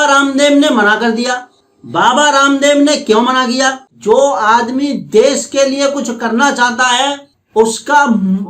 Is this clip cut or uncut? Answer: cut